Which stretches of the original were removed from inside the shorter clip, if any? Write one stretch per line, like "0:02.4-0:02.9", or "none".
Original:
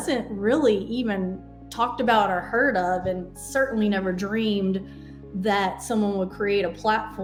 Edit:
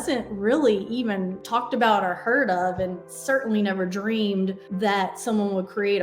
0:01.4-0:01.6
0:04.9-0:05.3